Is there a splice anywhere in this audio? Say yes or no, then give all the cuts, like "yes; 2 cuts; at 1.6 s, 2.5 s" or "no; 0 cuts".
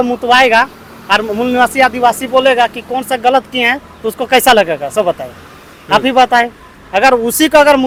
no; 0 cuts